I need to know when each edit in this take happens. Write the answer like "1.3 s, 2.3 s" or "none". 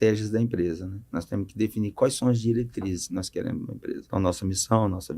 4.0 s